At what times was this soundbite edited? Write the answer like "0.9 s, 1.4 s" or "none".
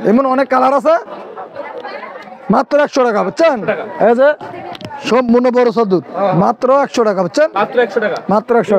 none